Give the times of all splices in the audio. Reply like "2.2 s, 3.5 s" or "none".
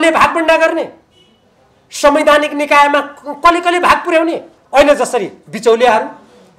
4.5 s